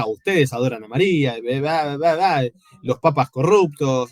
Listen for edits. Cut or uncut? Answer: uncut